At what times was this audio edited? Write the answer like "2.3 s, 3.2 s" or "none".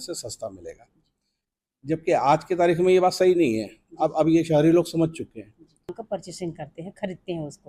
5.9 s